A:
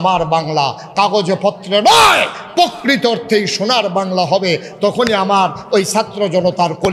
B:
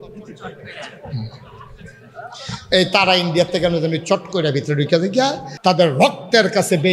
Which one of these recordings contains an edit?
B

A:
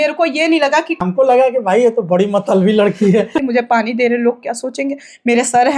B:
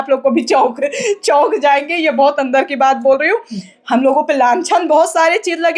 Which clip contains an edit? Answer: A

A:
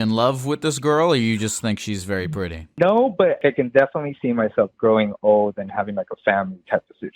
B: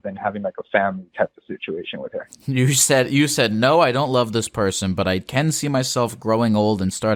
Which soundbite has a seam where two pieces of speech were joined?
A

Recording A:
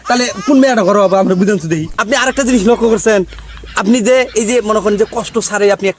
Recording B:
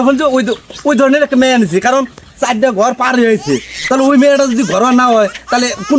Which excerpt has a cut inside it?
A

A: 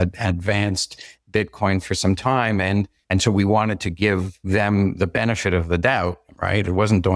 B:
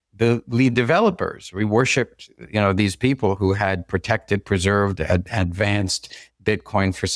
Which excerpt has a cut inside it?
A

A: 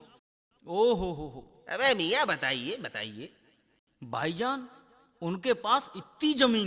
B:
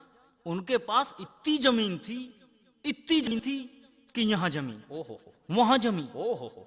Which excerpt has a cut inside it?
B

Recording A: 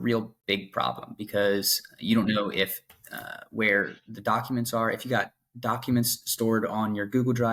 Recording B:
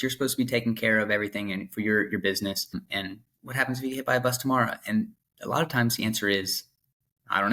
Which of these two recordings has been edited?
B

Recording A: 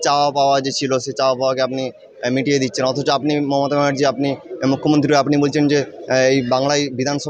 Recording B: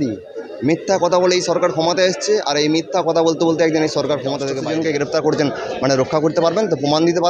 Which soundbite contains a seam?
B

